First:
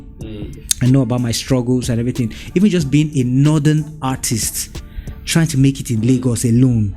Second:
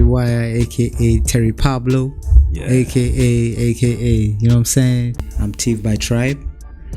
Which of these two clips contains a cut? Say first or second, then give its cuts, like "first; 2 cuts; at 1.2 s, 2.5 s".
second; 1 cut; at 5.2 s